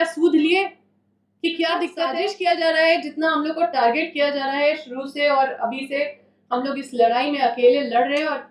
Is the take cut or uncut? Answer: cut